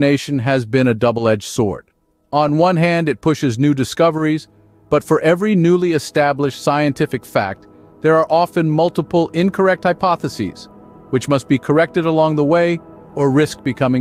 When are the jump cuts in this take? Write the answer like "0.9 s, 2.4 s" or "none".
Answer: none

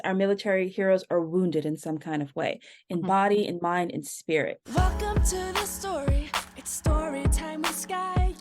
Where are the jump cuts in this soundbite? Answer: 4.6 s

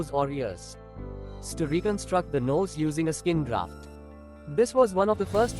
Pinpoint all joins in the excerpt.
1.5 s

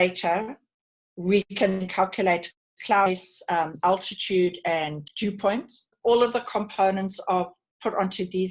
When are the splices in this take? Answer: 5.0 s, 5.9 s

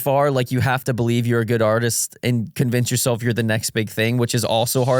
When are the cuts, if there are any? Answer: none

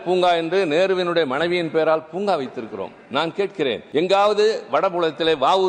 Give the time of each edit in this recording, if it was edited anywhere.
3.8 s

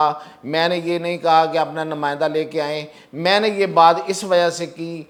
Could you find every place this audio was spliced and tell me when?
none

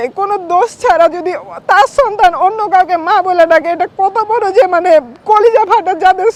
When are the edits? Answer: none

